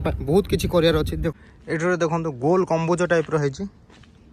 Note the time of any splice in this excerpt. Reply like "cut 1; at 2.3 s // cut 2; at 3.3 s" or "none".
cut 1; at 1.3 s